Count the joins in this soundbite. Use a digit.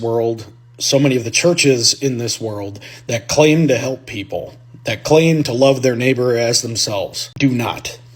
1